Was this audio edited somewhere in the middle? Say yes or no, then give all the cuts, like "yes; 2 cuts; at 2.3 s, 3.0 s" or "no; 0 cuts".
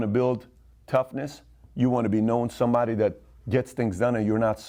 no; 0 cuts